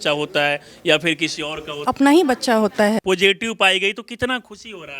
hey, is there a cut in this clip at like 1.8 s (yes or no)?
yes